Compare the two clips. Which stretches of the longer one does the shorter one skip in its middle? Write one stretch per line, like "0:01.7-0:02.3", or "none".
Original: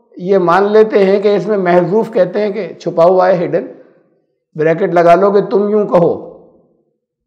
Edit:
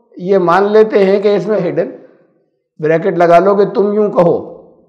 0:01.6-0:03.4

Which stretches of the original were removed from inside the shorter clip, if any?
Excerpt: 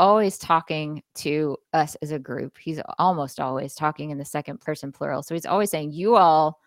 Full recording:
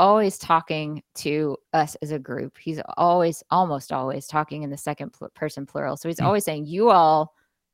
0:02.9-0:03.4
0:05.1-0:05.3

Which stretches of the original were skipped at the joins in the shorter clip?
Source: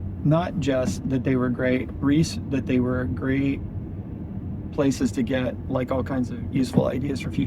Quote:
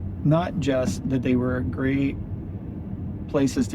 0:01.2-0:02.7

